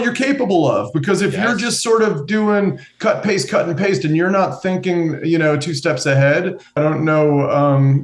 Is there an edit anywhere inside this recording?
yes; 1 cut; at 6.8 s

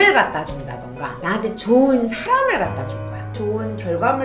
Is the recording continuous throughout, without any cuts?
no; 2 cuts; at 1.1 s, 3.4 s

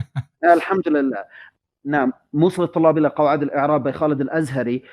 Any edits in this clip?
yes; 1 cut; at 1.4 s

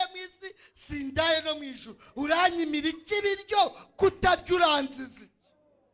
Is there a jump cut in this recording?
no; 0 cuts

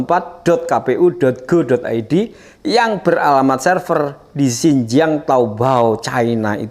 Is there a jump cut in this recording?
no; 0 cuts

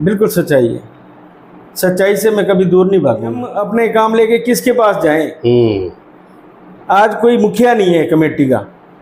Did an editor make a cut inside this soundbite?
yes; 1 cut; at 3.6 s

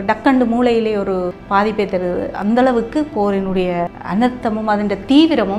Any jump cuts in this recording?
yes; 2 cuts; at 1.4 s, 4.0 s

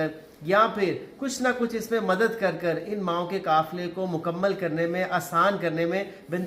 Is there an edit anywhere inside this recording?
no; 0 cuts

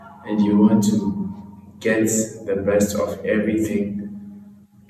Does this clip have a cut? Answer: no; 0 cuts

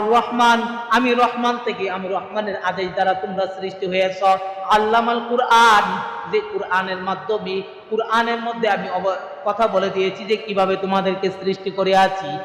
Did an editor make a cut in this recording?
no; 0 cuts

